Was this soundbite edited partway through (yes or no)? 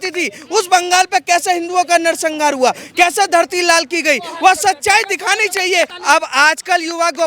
yes